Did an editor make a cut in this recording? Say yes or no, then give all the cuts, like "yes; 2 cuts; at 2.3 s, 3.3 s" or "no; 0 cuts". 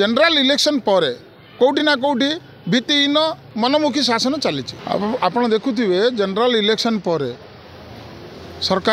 yes; 2 cuts; at 3.4 s, 4.7 s